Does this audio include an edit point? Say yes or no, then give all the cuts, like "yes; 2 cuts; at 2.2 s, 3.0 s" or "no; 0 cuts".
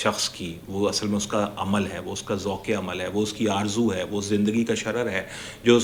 no; 0 cuts